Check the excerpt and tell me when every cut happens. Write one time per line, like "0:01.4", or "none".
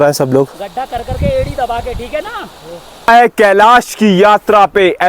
0:03.1